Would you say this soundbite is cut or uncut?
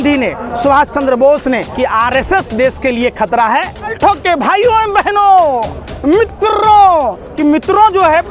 cut